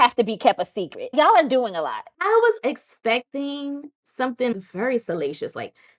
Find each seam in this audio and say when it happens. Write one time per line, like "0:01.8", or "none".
none